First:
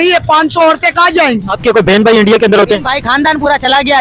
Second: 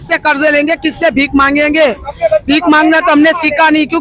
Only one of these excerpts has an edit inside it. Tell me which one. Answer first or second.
first